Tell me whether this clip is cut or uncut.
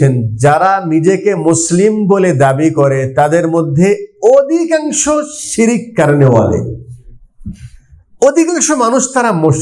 uncut